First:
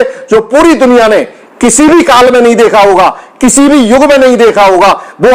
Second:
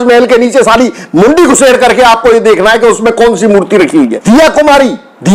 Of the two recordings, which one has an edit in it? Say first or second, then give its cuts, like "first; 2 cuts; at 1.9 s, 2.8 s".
second; 1 cut; at 4.2 s